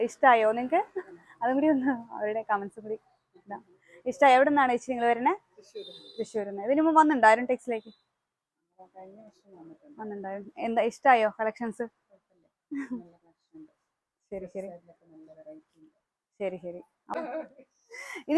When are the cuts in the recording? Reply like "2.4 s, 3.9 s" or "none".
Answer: 17.1 s